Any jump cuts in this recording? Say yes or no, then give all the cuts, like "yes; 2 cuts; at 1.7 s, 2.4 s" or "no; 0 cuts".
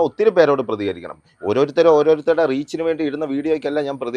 no; 0 cuts